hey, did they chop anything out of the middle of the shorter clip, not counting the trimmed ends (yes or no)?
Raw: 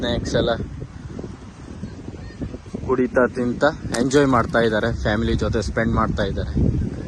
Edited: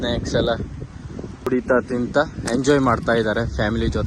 yes